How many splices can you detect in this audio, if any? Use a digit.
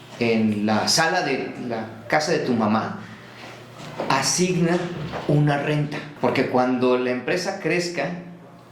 1